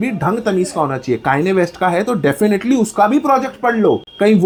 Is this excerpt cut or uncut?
uncut